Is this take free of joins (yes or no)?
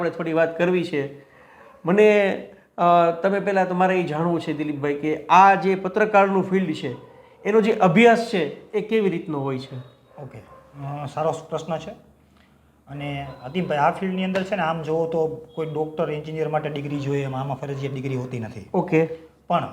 yes